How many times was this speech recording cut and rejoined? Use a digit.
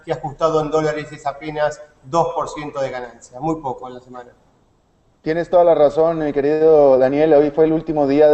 1